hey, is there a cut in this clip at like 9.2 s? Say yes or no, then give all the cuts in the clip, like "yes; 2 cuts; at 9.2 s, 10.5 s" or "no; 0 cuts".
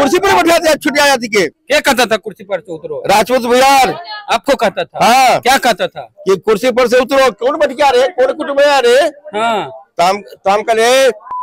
no; 1 cut; at 1.6 s